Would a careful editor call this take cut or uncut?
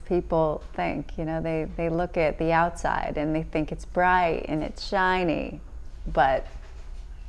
uncut